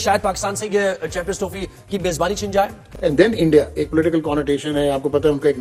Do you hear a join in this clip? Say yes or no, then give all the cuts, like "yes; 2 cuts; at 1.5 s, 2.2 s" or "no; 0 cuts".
no; 0 cuts